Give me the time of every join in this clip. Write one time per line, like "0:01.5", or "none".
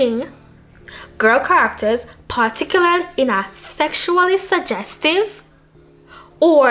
none